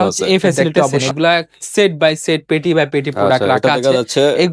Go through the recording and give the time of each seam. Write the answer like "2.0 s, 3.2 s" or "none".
1.0 s